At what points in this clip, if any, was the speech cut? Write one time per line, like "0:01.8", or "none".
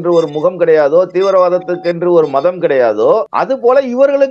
0:03.3